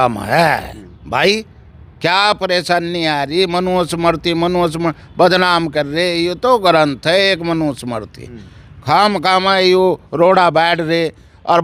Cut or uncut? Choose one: uncut